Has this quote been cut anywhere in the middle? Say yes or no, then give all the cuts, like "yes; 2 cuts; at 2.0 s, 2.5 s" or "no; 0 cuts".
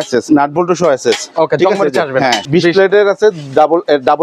yes; 1 cut; at 2.4 s